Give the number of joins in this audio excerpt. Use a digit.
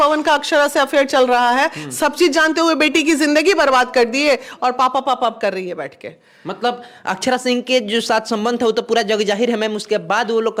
0